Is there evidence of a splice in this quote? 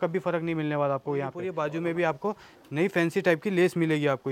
yes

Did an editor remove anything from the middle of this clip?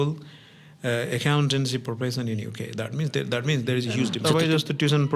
yes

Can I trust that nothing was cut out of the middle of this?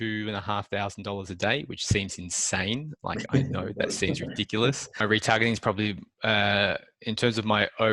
no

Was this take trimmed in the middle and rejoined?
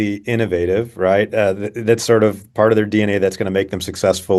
no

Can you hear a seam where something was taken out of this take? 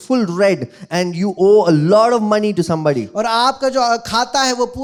no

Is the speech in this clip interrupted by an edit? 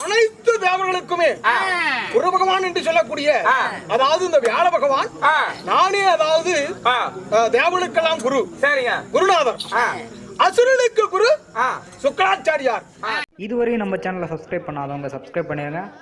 yes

